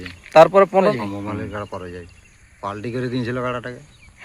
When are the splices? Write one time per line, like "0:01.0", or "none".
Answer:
0:00.9